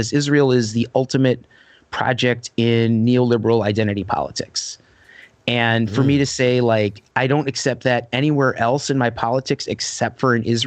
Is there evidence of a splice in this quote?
no; 0 cuts

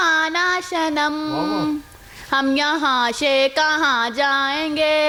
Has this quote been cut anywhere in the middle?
no; 0 cuts

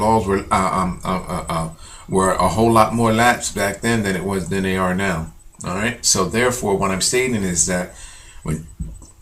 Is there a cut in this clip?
no; 0 cuts

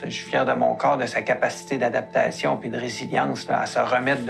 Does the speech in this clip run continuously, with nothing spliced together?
yes; 0 cuts

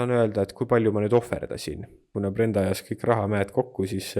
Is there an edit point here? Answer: yes; 1 cut; at 2.1 s

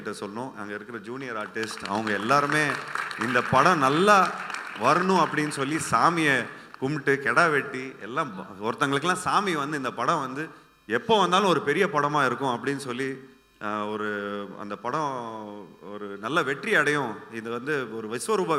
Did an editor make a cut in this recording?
no; 0 cuts

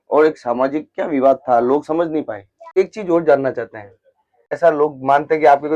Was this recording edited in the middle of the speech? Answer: yes; 2 cuts; at 2.8 s, 4.6 s

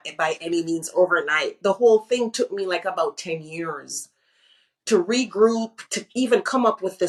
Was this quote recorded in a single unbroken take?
yes; 0 cuts

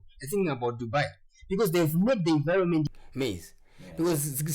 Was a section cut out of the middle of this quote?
yes; 1 cut; at 2.9 s

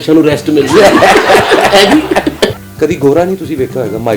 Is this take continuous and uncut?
no; 1 cut; at 2.5 s

